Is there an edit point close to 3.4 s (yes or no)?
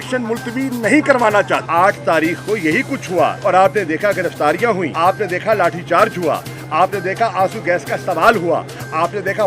yes